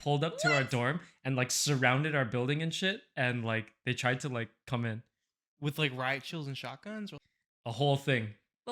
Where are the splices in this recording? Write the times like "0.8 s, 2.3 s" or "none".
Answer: 7.1 s